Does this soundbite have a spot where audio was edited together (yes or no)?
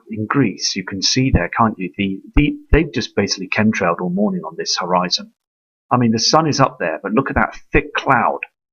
yes